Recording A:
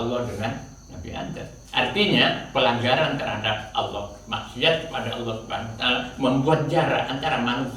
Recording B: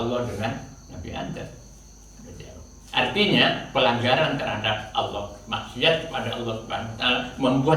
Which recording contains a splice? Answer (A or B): A